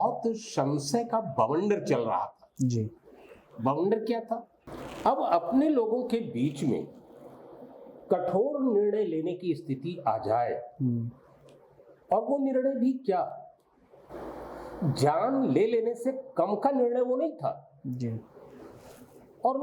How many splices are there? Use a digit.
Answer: 0